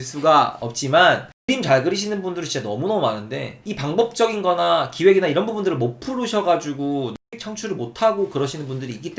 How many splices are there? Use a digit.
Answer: 2